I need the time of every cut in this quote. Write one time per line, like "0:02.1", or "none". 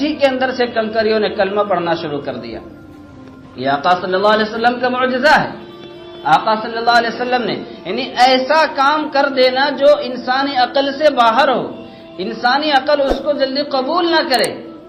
none